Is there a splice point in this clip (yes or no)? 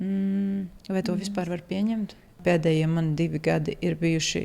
yes